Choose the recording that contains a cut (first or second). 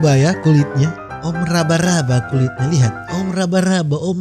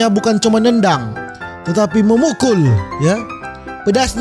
first